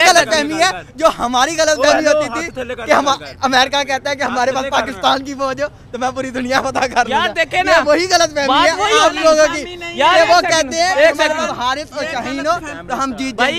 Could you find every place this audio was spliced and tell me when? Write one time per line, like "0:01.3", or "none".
none